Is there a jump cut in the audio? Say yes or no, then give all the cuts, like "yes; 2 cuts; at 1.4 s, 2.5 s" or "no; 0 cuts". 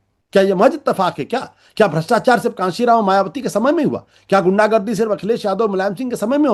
no; 0 cuts